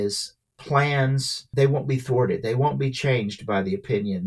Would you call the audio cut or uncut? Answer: cut